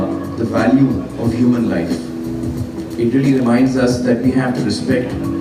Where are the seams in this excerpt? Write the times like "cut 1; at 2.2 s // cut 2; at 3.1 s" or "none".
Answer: none